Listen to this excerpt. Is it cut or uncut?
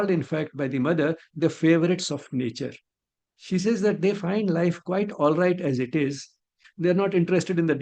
cut